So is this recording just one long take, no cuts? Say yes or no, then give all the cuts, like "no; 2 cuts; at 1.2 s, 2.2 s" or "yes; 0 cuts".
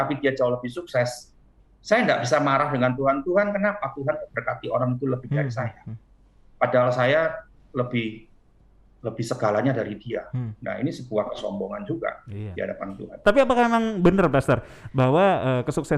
no; 1 cut; at 13.1 s